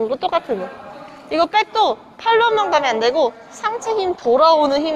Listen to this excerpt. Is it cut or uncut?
uncut